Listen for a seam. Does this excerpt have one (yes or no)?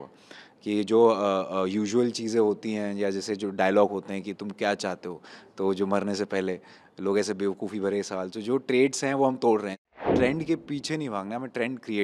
yes